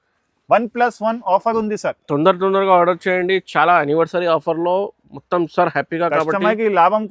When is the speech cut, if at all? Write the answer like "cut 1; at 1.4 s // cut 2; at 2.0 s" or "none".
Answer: none

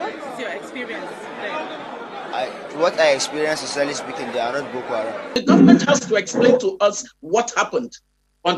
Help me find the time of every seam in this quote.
cut 1; at 5.3 s

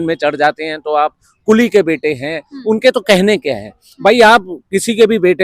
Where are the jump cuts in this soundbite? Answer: none

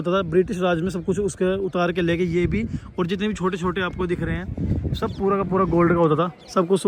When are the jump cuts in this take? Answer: none

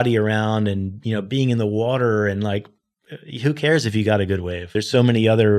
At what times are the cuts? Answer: cut 1; at 4.7 s

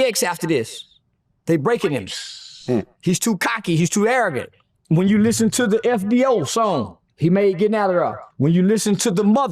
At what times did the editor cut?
cut 1; at 4.4 s // cut 2; at 8.2 s

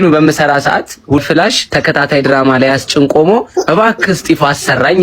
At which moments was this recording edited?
cut 1; at 1.2 s

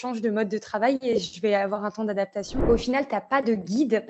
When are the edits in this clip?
cut 1; at 2.6 s

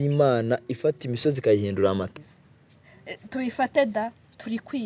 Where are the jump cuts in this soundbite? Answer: cut 1; at 2.1 s

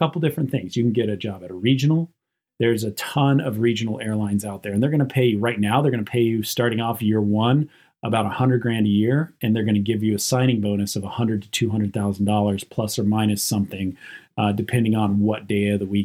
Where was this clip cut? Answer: cut 1; at 2.4 s

